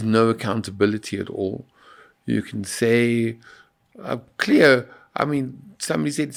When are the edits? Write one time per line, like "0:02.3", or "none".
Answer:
none